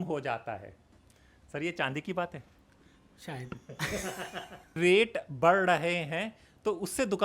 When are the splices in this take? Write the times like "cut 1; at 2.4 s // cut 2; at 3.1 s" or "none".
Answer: cut 1; at 4.8 s